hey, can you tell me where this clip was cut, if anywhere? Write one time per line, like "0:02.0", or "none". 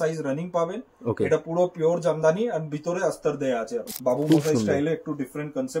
0:03.8